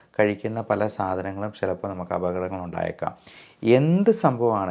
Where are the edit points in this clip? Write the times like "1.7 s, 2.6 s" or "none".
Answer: none